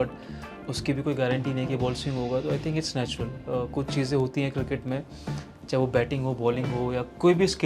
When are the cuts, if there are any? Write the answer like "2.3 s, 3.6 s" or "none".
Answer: none